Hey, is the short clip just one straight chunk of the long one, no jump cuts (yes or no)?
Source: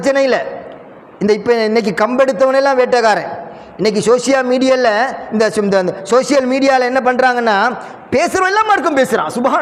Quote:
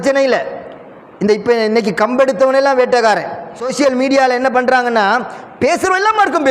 no